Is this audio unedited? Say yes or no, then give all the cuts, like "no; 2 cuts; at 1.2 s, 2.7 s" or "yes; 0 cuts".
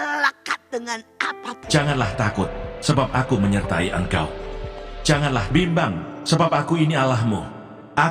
no; 1 cut; at 1.5 s